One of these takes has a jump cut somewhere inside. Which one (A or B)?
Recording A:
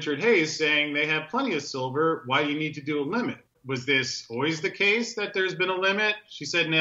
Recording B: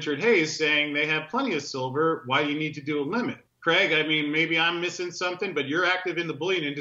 A